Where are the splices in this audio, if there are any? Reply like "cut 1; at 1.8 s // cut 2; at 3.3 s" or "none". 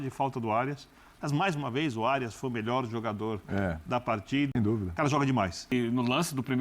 cut 1; at 4.5 s // cut 2; at 5.7 s